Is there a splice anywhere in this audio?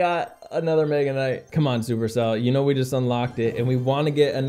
yes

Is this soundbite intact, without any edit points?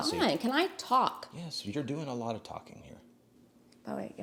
yes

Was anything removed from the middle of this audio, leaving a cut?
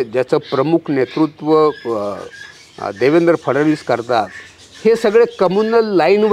no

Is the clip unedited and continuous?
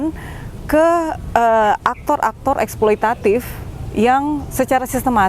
yes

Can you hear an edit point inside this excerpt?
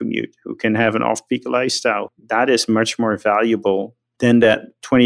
yes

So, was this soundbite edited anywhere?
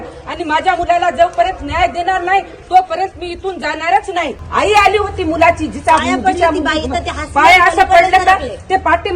yes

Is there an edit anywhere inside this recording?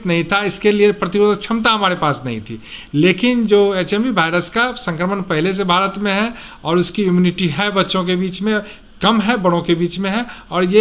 no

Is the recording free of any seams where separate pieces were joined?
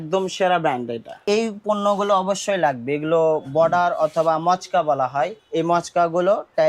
no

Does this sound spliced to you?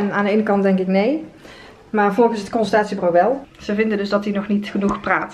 yes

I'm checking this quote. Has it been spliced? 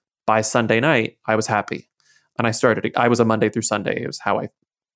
yes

